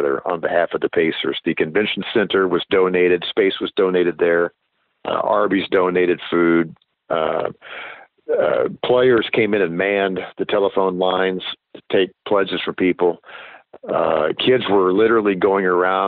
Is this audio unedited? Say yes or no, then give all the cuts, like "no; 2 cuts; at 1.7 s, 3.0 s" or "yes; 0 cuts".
yes; 0 cuts